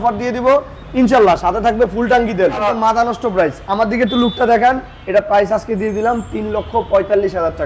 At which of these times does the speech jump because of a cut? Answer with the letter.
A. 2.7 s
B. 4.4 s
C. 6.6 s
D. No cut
A